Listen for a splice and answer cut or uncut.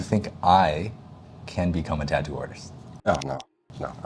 uncut